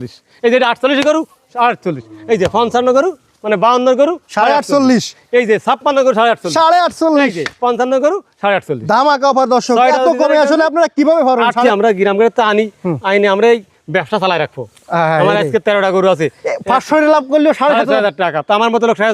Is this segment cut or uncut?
cut